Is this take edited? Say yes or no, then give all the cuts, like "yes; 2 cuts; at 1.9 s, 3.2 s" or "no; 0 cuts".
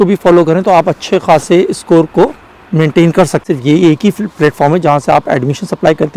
yes; 1 cut; at 3.4 s